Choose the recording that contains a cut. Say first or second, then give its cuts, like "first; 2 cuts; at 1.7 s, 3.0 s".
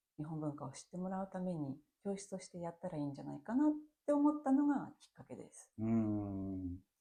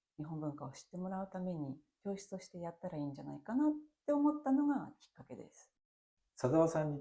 second; 1 cut; at 5.7 s